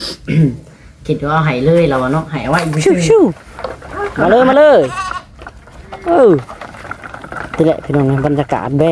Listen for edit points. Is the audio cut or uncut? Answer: cut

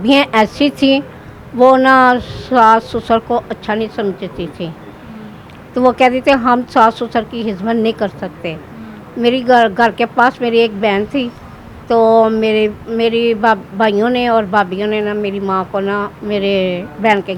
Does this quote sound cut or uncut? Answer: uncut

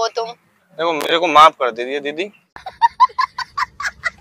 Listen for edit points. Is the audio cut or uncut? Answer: cut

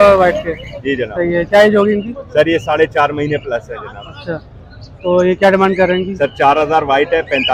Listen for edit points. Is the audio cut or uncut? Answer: uncut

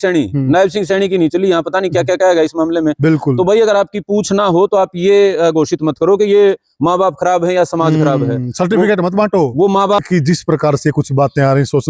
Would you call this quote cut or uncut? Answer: cut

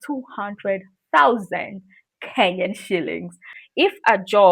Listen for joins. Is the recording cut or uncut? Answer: cut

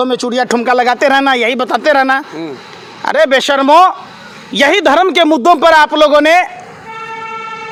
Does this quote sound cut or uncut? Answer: uncut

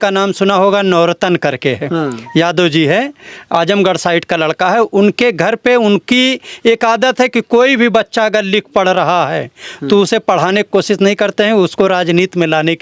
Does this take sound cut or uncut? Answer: uncut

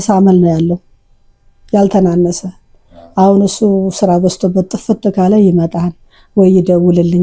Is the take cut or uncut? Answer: uncut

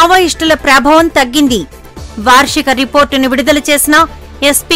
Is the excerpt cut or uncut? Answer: uncut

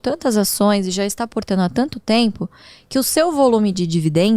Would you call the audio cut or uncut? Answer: uncut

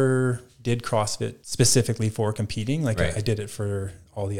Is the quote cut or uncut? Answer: cut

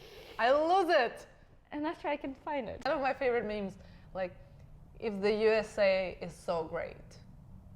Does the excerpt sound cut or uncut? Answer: cut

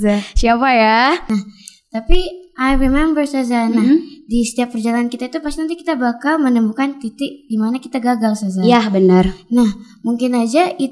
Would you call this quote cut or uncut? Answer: cut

